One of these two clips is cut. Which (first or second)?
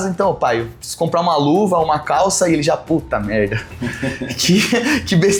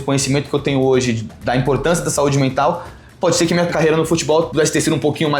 second